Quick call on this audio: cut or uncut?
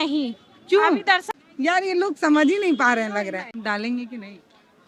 cut